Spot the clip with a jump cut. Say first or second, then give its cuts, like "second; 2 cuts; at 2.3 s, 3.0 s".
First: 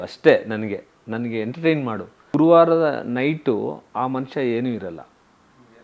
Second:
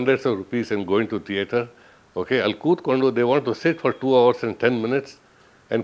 first; 1 cut; at 2.3 s